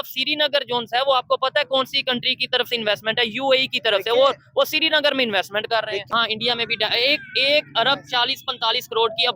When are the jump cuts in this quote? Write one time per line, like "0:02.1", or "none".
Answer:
0:06.1